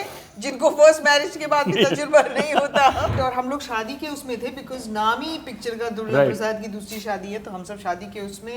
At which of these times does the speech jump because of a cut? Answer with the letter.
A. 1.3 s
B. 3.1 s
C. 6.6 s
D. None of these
B